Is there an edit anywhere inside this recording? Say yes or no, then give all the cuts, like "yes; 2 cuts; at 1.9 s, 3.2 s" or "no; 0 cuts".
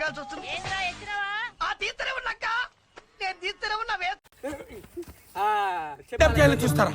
yes; 1 cut; at 4.2 s